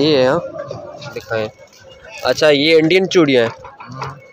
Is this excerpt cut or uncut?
cut